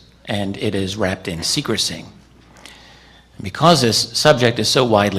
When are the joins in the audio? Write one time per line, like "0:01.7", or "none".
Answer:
0:02.1